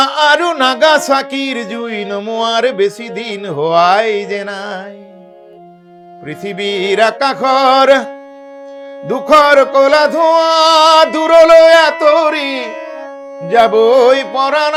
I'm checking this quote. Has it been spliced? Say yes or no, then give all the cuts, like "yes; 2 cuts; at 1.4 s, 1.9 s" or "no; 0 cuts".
no; 0 cuts